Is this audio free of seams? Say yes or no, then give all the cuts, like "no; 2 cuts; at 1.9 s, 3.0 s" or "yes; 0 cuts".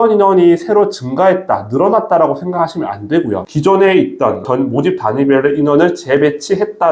no; 2 cuts; at 3.5 s, 4.4 s